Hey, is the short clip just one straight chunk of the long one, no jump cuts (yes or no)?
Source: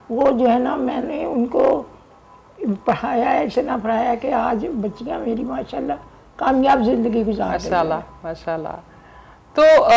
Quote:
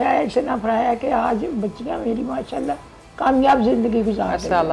yes